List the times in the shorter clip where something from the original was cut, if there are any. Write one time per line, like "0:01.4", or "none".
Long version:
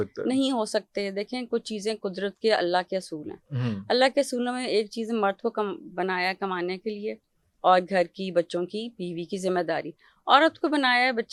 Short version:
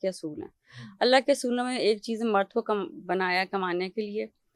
none